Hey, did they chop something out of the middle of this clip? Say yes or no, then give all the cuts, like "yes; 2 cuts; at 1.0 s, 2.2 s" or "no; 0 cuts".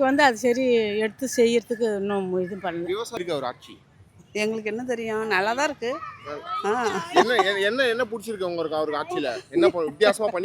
yes; 1 cut; at 3.1 s